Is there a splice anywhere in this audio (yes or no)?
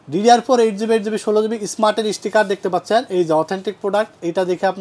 no